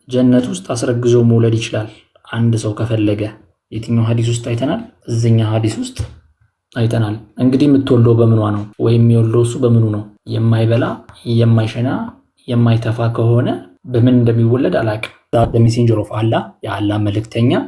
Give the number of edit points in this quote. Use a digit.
6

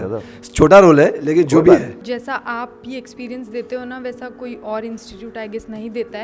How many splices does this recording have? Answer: 1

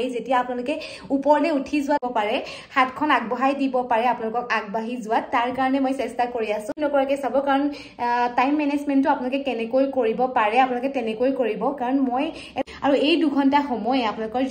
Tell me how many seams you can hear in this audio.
3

